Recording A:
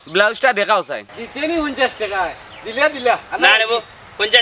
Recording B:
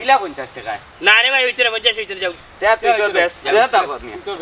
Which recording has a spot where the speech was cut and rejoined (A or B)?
A